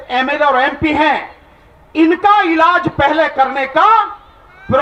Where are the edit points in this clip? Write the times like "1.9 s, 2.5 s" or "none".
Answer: none